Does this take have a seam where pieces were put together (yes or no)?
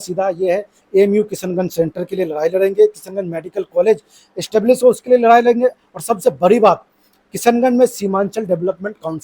no